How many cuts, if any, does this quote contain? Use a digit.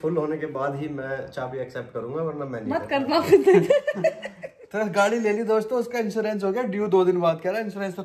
0